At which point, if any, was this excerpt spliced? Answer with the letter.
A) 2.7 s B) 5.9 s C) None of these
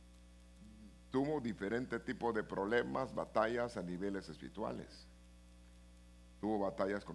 C